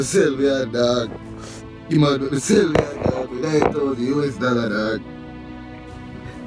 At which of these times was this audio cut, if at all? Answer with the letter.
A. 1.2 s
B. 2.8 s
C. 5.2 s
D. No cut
D